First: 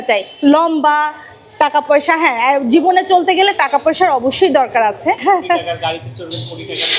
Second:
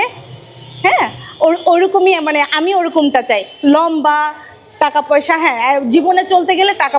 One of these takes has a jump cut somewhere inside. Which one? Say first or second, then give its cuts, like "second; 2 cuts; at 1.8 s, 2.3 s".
first; 1 cut; at 5.2 s